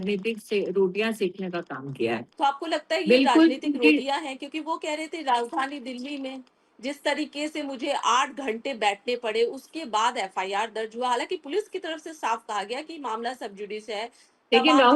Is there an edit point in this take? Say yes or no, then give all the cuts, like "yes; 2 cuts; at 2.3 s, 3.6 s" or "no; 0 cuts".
no; 0 cuts